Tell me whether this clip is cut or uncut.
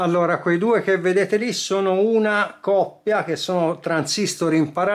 uncut